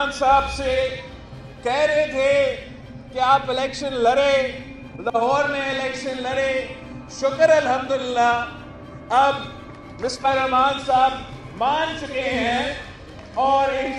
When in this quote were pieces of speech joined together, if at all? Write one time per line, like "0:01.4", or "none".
none